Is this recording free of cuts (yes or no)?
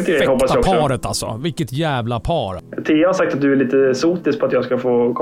no